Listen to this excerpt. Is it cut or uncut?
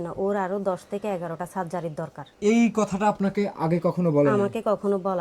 cut